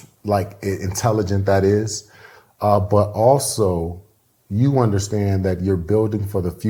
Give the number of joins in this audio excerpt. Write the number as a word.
zero